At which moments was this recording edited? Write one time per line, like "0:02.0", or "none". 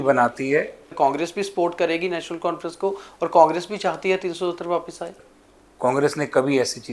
0:00.9
0:05.1